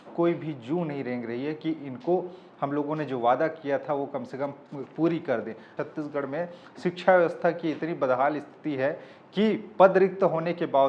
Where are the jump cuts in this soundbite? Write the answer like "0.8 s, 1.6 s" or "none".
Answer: 5.8 s